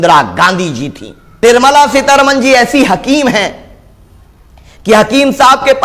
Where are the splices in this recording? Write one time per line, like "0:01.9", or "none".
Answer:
0:01.2